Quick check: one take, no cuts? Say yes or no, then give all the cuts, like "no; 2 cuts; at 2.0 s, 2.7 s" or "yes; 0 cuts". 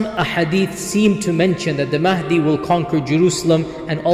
yes; 0 cuts